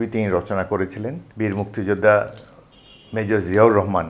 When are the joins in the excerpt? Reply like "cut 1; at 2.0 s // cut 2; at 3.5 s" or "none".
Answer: cut 1; at 1.2 s